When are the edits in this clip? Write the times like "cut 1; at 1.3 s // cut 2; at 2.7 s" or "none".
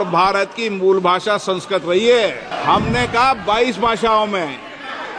cut 1; at 2.5 s